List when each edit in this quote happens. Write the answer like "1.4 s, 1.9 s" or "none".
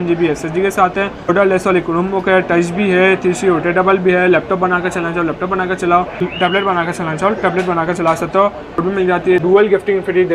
1.3 s, 6.2 s, 8.9 s